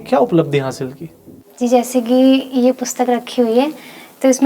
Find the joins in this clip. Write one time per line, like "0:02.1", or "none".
none